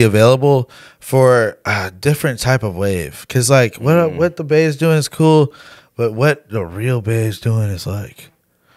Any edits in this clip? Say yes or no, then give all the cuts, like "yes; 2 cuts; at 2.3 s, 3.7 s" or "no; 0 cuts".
no; 0 cuts